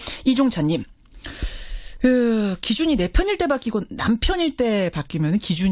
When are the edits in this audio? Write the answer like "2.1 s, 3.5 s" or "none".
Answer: 4.7 s